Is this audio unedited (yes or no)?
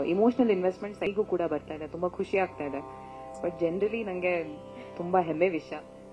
no